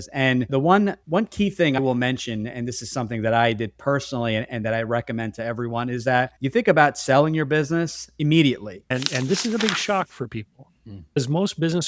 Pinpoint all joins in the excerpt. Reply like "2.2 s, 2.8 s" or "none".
8.9 s